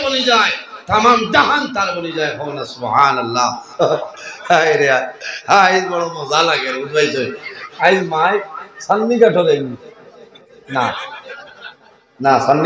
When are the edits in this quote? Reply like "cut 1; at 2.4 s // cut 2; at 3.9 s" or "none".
cut 1; at 3.6 s